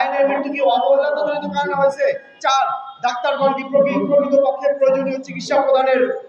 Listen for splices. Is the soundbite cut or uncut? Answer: uncut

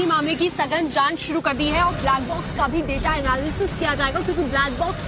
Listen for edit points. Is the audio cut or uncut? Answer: cut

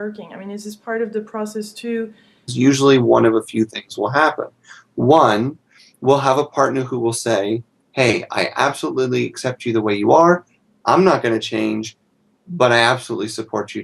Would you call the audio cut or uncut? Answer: uncut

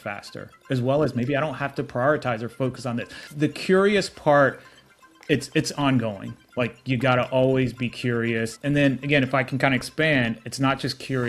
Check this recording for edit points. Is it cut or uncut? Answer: cut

